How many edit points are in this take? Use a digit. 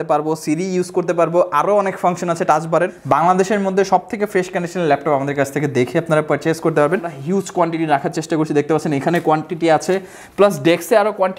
2